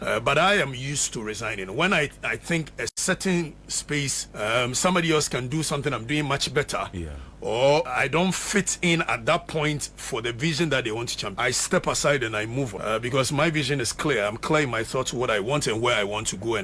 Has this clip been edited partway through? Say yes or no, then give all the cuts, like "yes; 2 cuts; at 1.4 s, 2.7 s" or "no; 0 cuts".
yes; 4 cuts; at 4.2 s, 7.9 s, 11.2 s, 12.8 s